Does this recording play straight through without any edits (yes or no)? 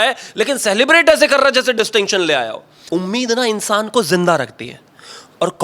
no